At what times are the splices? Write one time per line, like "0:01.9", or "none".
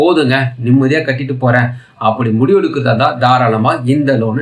none